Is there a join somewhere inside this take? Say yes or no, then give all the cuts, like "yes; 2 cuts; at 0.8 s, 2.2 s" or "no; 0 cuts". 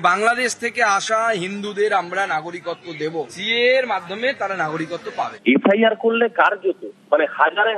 yes; 2 cuts; at 3.3 s, 5.4 s